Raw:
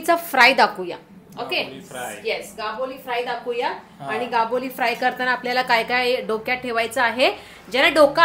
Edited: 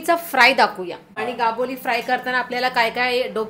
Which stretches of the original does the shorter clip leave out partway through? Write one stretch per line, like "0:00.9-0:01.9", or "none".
0:01.1-0:04.0

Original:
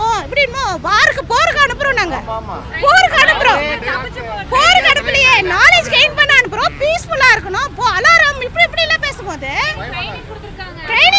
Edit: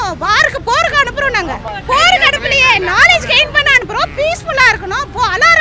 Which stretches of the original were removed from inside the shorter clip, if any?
0:02.3-0:04.3

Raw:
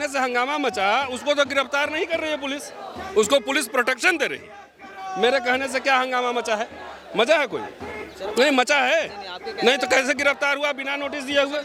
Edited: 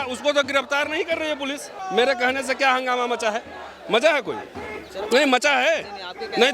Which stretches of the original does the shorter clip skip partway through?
0:02.7-0:05.0

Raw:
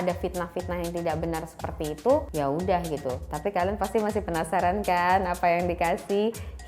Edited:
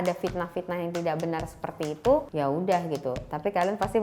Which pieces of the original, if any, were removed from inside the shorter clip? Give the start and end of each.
none

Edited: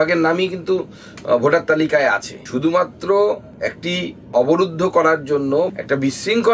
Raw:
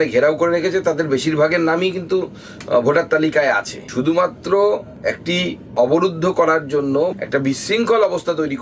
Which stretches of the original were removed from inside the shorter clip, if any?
none

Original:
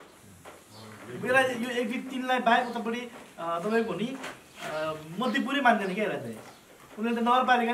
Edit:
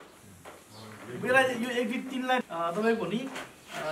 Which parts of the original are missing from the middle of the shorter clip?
0:02.4-0:03.3

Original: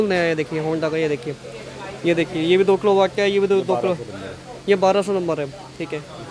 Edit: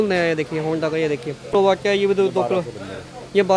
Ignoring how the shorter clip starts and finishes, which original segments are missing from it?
0:01.8-0:03.1

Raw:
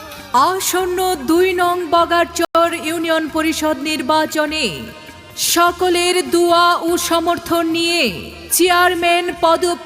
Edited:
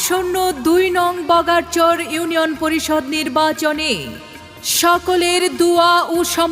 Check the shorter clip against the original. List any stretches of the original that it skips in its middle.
0:02.4-0:02.5

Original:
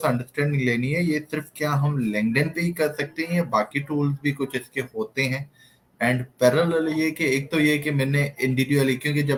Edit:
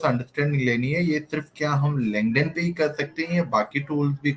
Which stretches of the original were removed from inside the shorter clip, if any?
none

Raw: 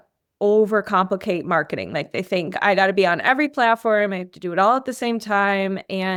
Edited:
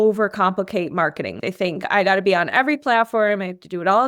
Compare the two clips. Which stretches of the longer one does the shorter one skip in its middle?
0:01.9-0:02.1

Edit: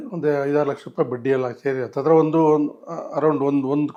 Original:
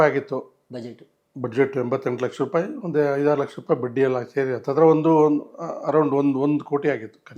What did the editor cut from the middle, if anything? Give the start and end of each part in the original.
none

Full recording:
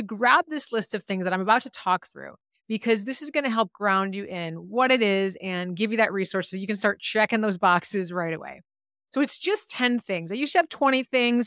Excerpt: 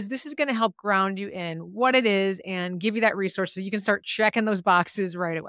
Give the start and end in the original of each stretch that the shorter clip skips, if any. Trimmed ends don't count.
none

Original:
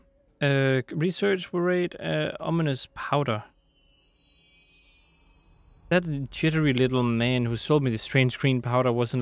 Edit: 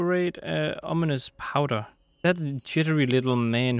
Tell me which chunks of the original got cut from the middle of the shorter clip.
0:03.6-0:05.7

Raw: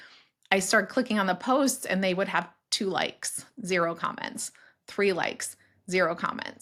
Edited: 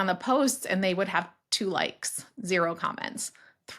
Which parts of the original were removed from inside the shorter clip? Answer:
none

